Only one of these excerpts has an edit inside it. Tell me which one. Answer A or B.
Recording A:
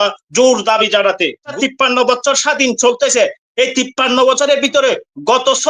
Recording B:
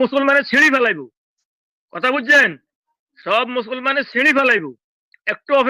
A